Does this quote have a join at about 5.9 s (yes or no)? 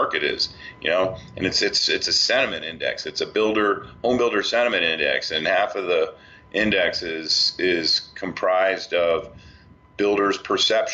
no